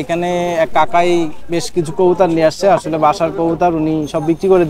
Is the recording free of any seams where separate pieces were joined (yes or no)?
yes